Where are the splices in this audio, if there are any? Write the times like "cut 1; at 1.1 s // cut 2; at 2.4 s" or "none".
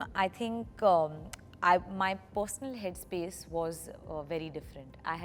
none

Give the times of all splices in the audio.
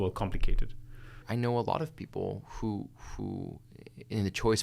cut 1; at 1.2 s

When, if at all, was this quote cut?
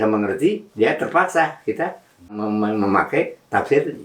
cut 1; at 2.4 s

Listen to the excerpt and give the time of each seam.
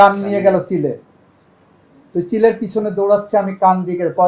none

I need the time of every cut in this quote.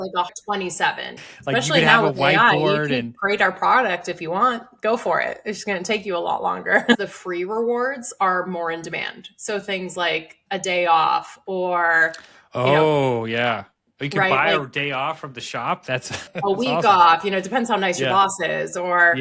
cut 1; at 1.1 s // cut 2; at 7.1 s

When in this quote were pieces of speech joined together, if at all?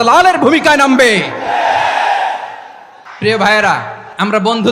none

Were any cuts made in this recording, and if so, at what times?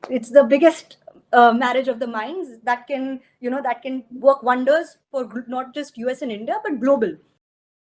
none

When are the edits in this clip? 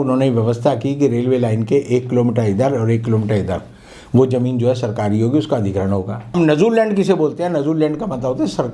cut 1; at 6.4 s

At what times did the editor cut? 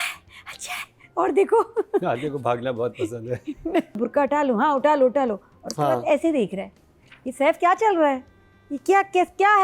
cut 1; at 4.0 s

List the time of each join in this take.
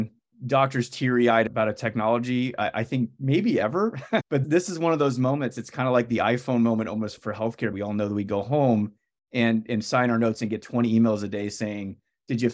cut 1; at 4.2 s // cut 2; at 7.7 s

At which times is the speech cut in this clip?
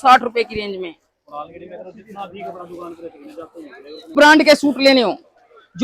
cut 1; at 4.1 s

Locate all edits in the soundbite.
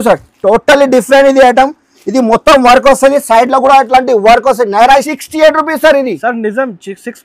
cut 1; at 5.2 s

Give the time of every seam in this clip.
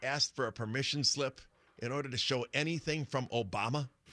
none

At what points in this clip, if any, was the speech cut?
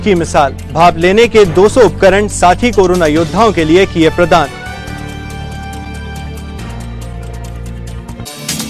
none

